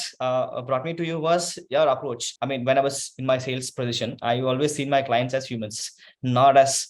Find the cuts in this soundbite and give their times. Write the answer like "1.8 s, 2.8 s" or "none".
2.3 s

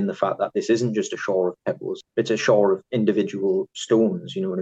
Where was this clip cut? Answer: 2.0 s

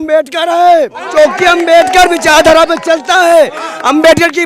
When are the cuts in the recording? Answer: 1.0 s

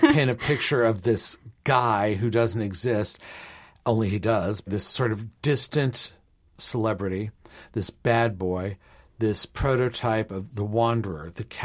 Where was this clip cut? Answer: 4.7 s, 6.5 s

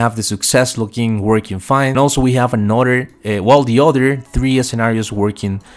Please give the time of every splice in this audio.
1.9 s

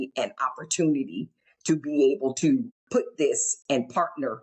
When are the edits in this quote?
2.8 s

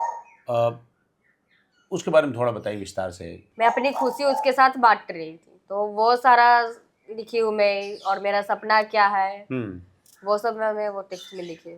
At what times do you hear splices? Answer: 3.4 s

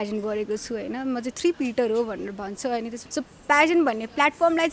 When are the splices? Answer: 3.0 s

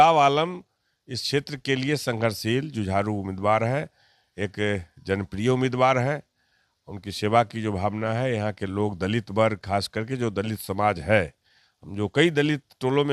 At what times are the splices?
none

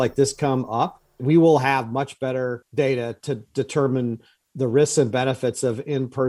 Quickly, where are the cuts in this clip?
1.2 s, 2.6 s

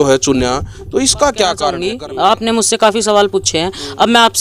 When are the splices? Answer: 1.8 s

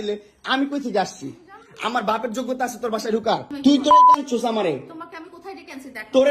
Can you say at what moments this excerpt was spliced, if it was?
3.5 s

